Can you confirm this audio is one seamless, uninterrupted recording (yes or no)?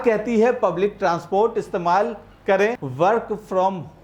no